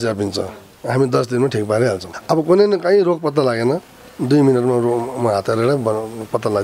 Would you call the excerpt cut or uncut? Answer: uncut